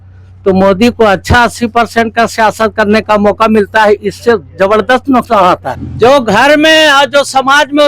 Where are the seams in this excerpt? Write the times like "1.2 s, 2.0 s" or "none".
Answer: 5.8 s